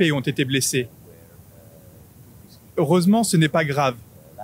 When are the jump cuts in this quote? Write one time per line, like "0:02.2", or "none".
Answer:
none